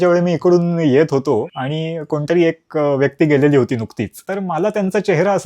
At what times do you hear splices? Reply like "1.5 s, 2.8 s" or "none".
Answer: 1.5 s, 4.2 s